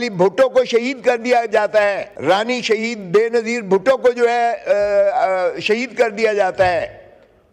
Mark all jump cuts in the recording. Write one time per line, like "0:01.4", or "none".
0:02.1